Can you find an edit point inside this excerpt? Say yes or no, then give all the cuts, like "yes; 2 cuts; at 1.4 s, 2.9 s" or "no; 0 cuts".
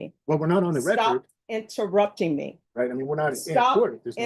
yes; 1 cut; at 2.6 s